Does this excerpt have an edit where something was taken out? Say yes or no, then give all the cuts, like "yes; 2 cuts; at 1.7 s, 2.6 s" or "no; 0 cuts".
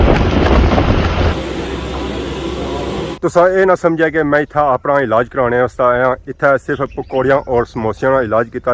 yes; 2 cuts; at 1.3 s, 3.1 s